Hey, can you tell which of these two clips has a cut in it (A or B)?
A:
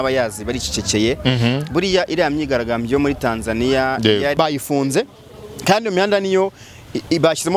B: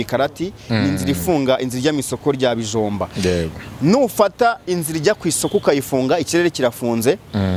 A